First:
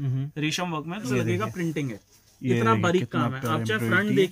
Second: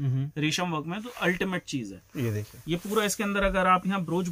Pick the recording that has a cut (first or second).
first